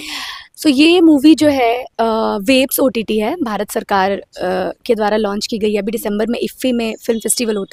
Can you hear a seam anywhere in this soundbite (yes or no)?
no